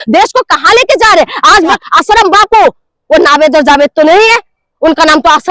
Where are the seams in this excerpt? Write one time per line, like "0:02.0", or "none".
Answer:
0:01.8